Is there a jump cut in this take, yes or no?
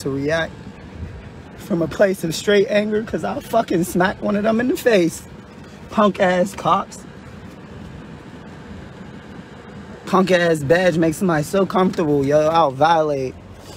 yes